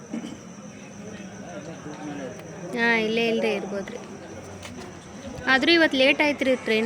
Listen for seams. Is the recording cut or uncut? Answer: uncut